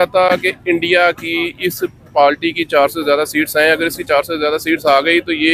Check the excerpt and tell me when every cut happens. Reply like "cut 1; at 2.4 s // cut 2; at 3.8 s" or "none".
none